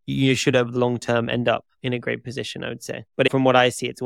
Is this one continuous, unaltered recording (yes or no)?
no